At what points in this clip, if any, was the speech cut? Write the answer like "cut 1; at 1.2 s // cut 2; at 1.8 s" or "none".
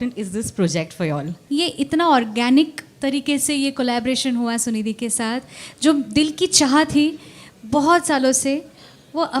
cut 1; at 1.3 s